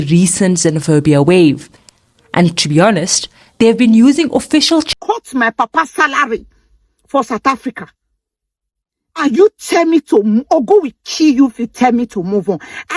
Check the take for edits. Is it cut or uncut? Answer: cut